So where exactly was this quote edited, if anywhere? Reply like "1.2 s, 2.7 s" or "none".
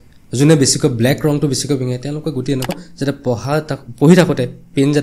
2.7 s